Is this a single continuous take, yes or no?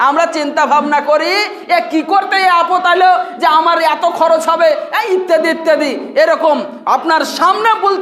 yes